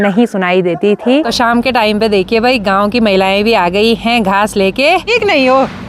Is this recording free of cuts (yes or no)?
no